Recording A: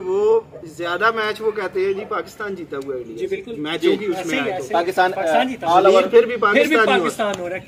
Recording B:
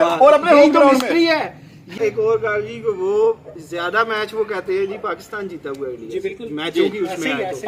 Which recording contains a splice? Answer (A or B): B